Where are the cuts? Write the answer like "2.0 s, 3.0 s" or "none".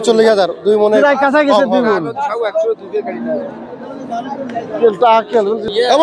none